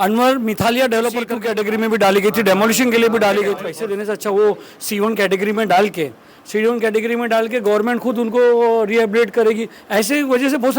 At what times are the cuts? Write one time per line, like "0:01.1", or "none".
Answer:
0:01.4
0:03.7